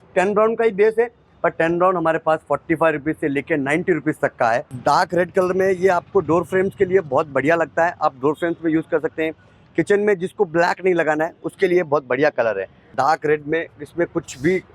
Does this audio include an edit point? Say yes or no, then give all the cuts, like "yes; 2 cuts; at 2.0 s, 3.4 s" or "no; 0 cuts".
yes; 2 cuts; at 4.7 s, 12.9 s